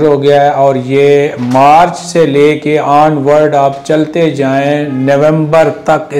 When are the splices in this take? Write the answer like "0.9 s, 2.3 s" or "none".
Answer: none